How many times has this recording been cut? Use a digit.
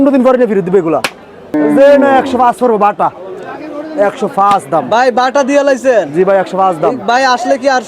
1